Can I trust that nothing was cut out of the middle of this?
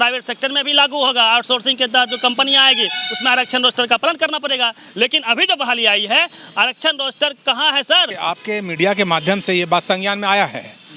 no; 1 cut; at 8.1 s

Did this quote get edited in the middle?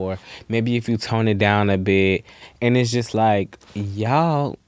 yes; 1 cut; at 3.6 s

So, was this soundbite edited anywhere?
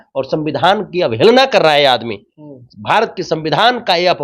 no; 0 cuts

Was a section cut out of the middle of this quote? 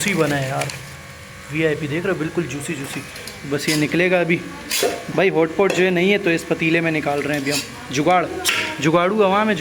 no; 0 cuts

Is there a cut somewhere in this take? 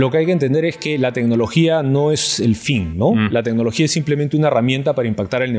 no; 0 cuts

